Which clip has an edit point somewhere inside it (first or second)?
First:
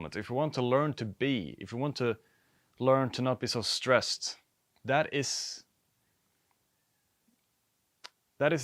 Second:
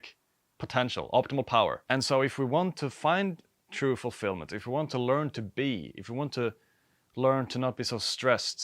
second